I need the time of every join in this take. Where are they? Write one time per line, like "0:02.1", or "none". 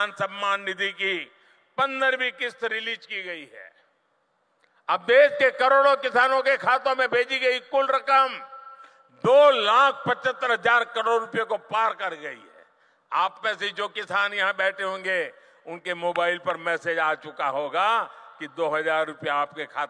none